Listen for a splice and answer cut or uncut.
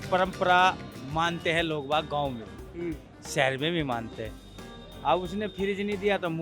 cut